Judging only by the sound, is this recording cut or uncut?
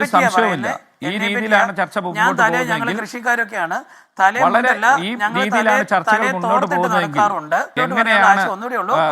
cut